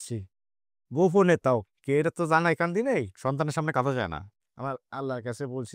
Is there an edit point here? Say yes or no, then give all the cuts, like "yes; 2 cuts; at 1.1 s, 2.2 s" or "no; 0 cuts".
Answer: yes; 1 cut; at 4.3 s